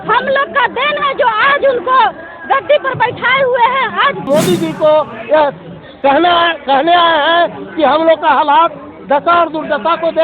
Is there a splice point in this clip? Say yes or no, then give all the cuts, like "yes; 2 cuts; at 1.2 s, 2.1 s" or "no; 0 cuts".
yes; 1 cut; at 4.3 s